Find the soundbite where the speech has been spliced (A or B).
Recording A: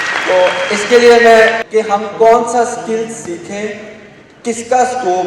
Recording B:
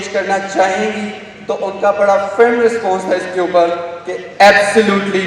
A